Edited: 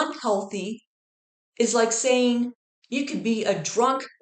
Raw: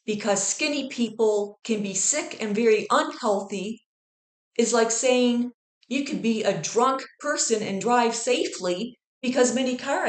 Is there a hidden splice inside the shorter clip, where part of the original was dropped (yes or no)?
no